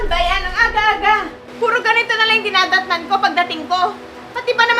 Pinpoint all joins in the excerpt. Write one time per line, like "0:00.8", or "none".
0:01.4

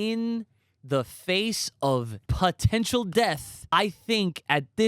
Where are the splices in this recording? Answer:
0:02.2
0:03.7

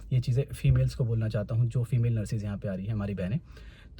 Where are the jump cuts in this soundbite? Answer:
none

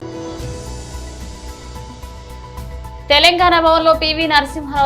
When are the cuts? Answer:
none

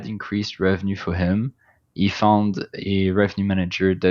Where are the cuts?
none

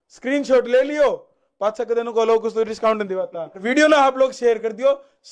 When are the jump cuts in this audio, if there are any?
0:03.6

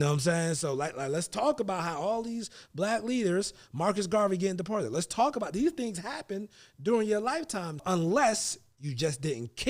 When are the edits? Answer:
0:07.8

